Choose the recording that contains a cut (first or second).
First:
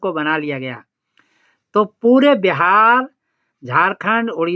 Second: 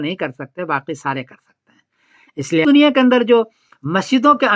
second